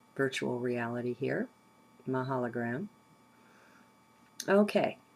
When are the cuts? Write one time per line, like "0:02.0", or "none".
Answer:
0:03.1